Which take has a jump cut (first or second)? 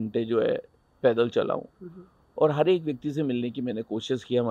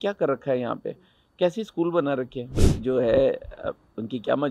second